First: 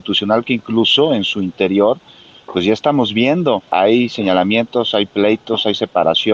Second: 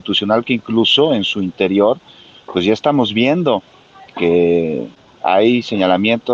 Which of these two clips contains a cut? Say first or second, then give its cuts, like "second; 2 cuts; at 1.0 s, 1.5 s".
first; 1 cut; at 3.6 s